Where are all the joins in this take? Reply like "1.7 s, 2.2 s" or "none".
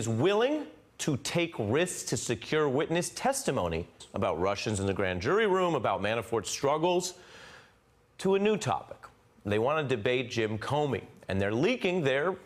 none